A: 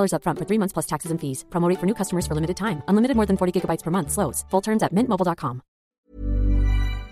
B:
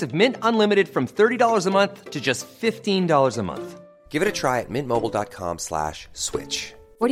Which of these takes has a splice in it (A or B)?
A